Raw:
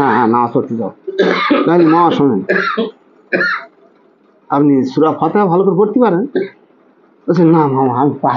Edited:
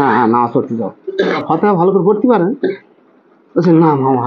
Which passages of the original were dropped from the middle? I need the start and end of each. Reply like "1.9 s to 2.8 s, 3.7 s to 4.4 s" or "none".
1.4 s to 5.1 s